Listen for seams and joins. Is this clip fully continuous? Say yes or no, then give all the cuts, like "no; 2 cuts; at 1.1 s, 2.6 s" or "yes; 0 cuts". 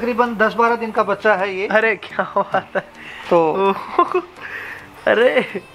yes; 0 cuts